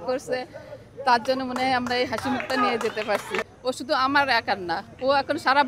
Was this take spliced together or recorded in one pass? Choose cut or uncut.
cut